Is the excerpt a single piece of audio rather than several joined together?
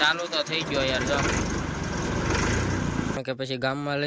no; 1 cut; at 3.2 s

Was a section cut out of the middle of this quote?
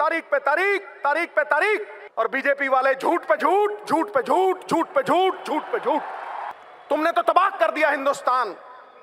yes; 2 cuts; at 2.0 s, 6.5 s

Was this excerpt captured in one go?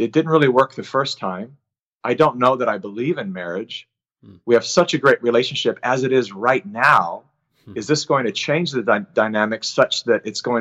yes; 0 cuts

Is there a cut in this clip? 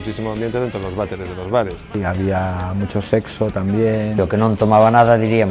yes; 2 cuts; at 1.9 s, 4.2 s

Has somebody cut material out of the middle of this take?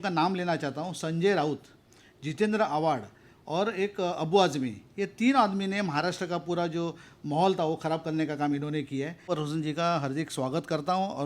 yes; 1 cut; at 9.3 s

